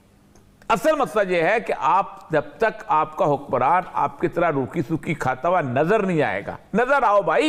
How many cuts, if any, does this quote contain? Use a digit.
0